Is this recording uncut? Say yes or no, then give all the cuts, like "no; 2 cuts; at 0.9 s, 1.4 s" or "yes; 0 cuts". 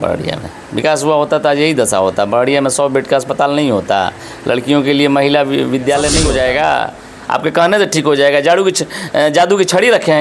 no; 1 cut; at 6.2 s